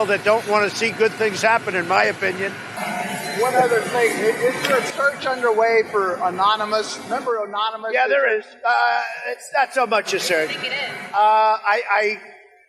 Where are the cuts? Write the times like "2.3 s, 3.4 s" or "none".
2.8 s

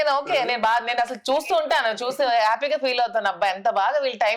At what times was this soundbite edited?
none

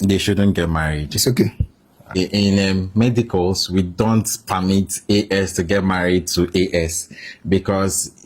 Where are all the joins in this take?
2.2 s

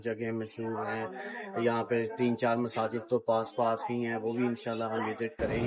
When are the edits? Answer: none

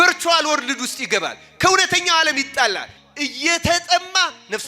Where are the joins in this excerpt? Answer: 2.9 s

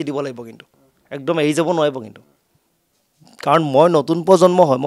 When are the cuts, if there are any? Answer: none

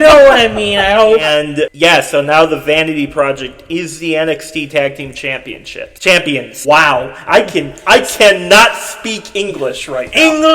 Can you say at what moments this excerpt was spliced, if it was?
1.3 s

